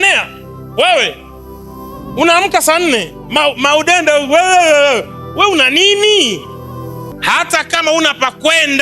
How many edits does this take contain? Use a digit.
1